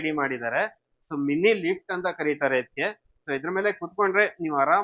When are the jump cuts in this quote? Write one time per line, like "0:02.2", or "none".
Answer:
none